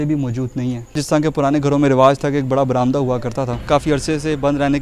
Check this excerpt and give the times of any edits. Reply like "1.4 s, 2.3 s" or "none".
1.0 s, 3.6 s